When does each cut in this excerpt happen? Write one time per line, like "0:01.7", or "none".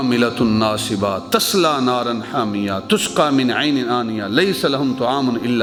none